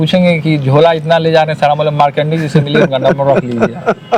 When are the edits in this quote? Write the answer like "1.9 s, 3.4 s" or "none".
none